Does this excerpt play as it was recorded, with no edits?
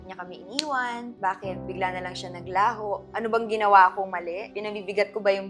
yes; 0 cuts

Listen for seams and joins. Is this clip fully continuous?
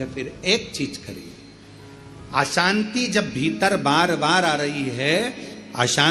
yes; 0 cuts

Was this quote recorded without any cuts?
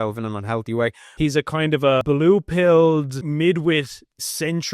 no; 3 cuts; at 1.0 s, 2.0 s, 3.3 s

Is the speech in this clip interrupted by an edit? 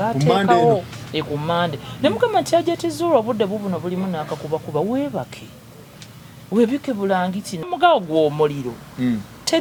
no; 0 cuts

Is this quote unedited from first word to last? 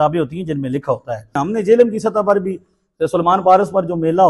no; 1 cut; at 1.4 s

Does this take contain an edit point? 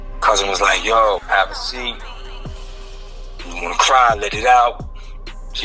yes; 1 cut; at 1.2 s

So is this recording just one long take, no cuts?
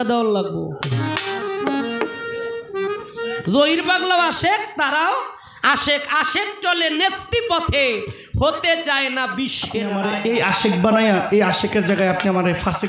no; 1 cut; at 9.9 s

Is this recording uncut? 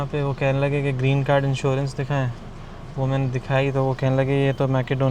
yes; 0 cuts

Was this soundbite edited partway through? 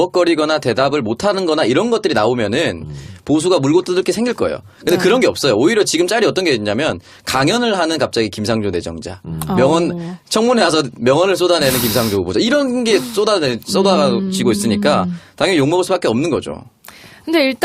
no; 0 cuts

